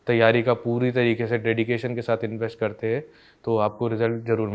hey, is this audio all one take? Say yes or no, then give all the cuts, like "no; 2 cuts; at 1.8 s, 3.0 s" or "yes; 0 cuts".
yes; 0 cuts